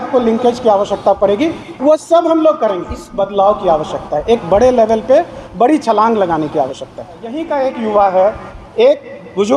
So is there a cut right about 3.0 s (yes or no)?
yes